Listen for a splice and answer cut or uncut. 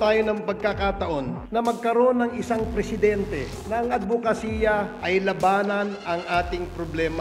uncut